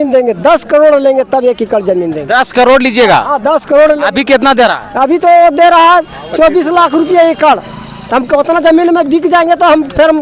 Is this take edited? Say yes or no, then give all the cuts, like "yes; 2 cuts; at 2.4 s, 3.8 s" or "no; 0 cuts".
no; 0 cuts